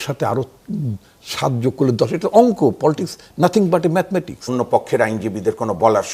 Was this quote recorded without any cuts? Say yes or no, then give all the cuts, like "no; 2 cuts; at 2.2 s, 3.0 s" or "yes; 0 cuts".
no; 1 cut; at 4.5 s